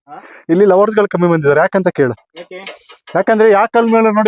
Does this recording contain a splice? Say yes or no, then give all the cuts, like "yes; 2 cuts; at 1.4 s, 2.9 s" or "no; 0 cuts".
no; 0 cuts